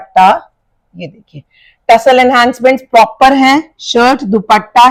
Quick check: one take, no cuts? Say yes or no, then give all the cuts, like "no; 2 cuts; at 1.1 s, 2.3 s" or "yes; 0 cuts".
yes; 0 cuts